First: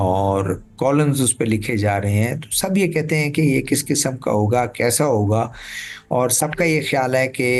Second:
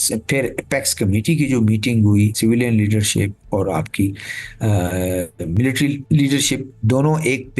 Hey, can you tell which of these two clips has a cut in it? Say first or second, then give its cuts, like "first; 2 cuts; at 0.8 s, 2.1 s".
second; 3 cuts; at 2.3 s, 6.0 s, 6.7 s